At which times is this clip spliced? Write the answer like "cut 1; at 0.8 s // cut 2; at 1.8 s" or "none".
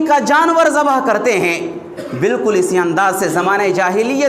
cut 1; at 1.9 s